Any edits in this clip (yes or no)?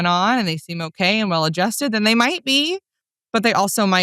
no